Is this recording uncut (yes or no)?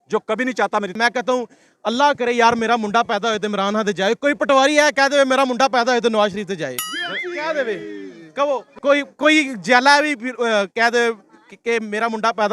no